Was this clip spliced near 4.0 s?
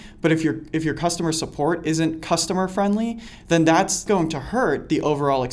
yes; 1 cut; at 4.0 s

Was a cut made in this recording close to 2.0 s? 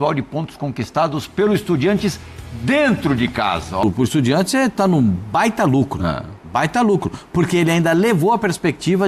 no; 1 cut; at 3.8 s

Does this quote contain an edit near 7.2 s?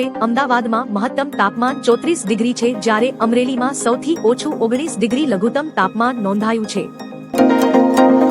yes; 1 cut; at 7.2 s

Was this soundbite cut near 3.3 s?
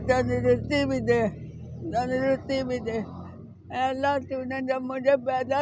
no; 0 cuts

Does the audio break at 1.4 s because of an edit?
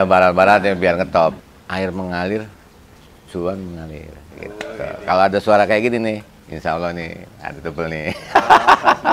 yes; 1 cut; at 1.4 s

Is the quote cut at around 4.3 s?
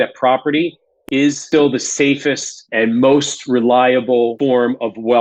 yes; 3 cuts; at 1.2 s, 2.6 s, 4.3 s

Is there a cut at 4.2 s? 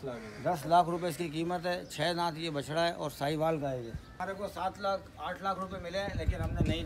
yes; 1 cut; at 4.2 s

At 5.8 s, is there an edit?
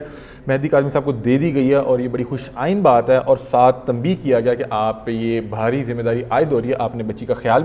no; 0 cuts

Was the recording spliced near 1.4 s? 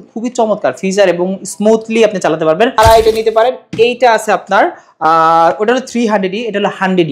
no; 1 cut; at 2.8 s

